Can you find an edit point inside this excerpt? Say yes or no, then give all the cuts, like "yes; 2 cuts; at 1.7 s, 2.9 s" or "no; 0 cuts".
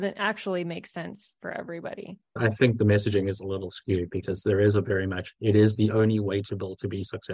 yes; 1 cut; at 2.3 s